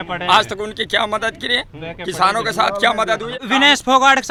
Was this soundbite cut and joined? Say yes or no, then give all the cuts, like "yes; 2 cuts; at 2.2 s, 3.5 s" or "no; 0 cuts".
no; 0 cuts